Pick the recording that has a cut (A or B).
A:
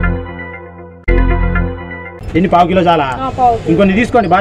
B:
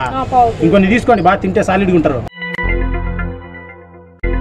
A